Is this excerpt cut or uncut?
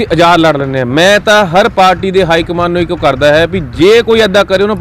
uncut